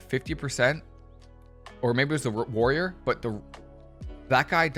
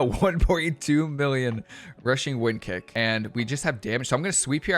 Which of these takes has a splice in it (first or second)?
second